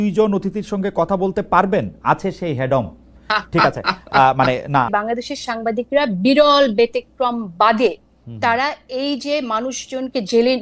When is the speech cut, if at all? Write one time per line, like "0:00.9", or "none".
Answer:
0:04.9

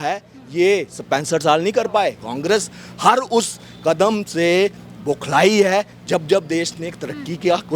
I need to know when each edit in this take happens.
0:02.2

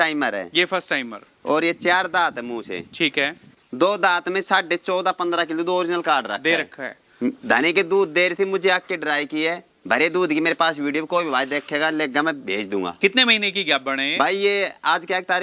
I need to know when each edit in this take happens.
0:03.5

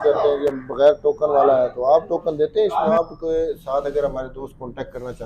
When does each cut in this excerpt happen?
0:02.9

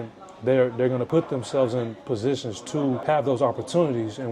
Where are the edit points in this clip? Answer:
0:01.1
0:03.0

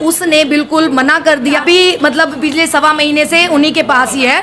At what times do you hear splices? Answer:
0:01.6

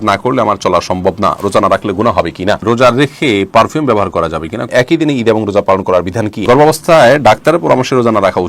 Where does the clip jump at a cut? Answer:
0:02.6
0:04.7
0:06.4

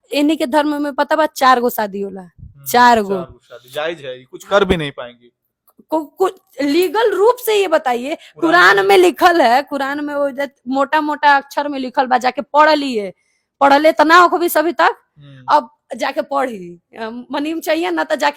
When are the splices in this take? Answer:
none

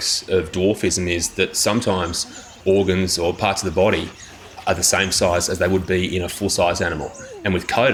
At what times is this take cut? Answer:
none

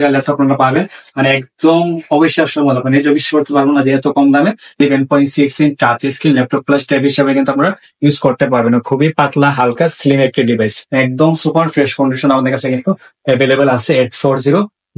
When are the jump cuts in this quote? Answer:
0:04.8
0:10.8

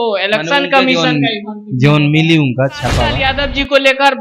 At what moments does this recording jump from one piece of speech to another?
0:03.2

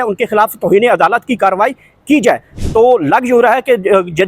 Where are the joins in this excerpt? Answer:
0:02.6

